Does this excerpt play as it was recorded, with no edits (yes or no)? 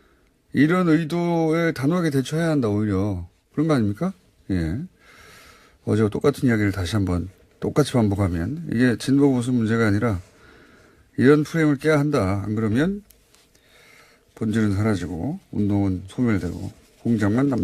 yes